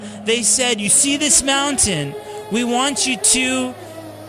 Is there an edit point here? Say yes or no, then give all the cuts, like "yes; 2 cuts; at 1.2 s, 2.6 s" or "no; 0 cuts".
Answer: no; 0 cuts